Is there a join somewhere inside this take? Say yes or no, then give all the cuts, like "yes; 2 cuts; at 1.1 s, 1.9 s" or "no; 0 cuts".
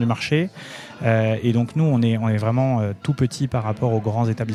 no; 0 cuts